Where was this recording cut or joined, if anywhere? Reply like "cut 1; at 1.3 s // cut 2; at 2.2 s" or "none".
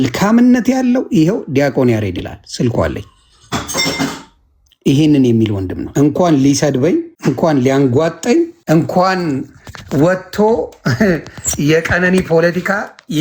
cut 1; at 5.8 s // cut 2; at 7.1 s // cut 3; at 8.6 s